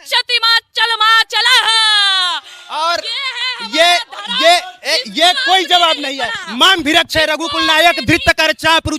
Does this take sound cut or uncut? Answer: uncut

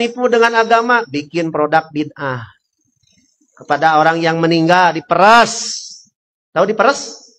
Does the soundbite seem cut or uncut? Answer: uncut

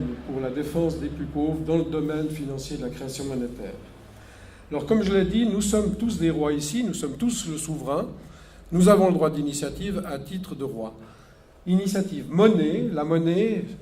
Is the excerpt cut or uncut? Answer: cut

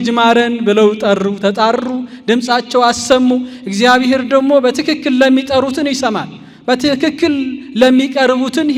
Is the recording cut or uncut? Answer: uncut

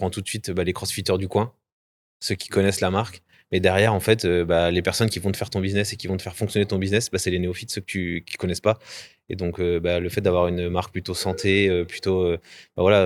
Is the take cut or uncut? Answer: uncut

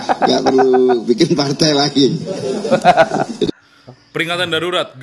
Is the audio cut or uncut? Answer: uncut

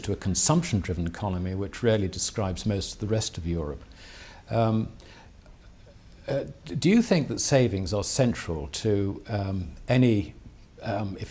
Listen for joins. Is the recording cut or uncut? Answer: uncut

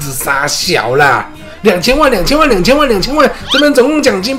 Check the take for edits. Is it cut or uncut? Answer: cut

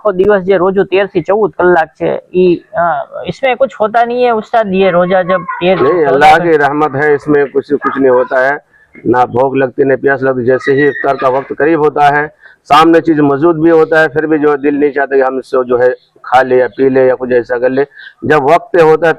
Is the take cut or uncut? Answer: uncut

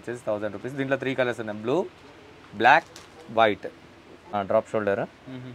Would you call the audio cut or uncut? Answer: cut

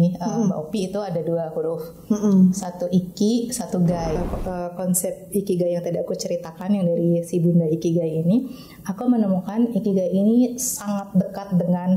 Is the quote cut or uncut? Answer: cut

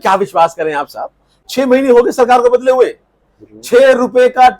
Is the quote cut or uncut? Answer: cut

